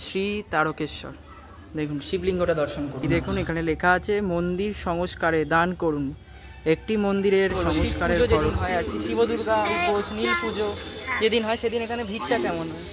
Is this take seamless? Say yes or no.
no